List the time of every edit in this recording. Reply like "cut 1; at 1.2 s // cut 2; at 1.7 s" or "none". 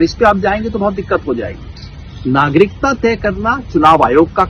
none

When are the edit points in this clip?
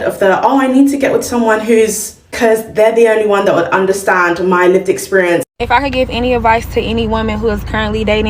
cut 1; at 5.5 s

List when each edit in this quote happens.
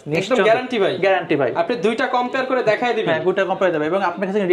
none

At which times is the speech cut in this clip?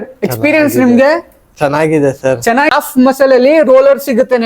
cut 1; at 2.7 s

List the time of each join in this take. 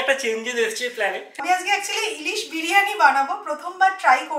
cut 1; at 1.4 s

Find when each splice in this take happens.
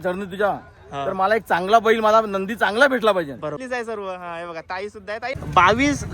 cut 1; at 3.6 s // cut 2; at 5.3 s

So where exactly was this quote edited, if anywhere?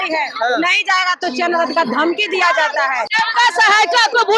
cut 1; at 3.1 s

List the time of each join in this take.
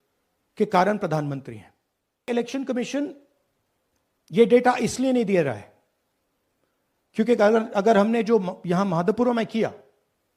cut 1; at 2.3 s

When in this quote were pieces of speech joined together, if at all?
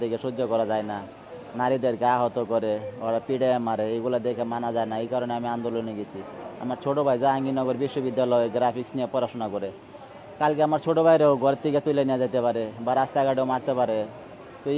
none

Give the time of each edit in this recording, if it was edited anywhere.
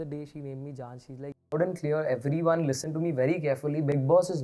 cut 1; at 1.5 s

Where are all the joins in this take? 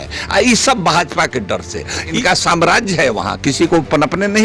cut 1; at 2.1 s

